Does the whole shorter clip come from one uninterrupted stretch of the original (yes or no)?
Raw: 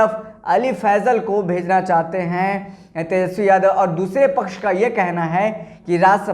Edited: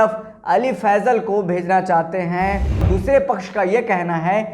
no